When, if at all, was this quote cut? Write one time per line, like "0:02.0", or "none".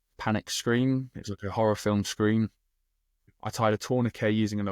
0:03.3